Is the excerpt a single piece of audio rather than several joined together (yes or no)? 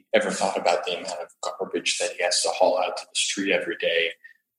yes